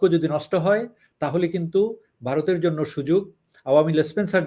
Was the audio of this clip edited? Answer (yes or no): no